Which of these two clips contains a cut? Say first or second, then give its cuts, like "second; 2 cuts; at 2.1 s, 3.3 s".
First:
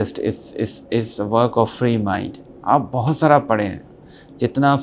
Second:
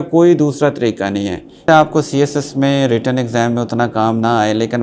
second; 1 cut; at 1.5 s